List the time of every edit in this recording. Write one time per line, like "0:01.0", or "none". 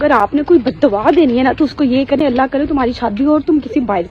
none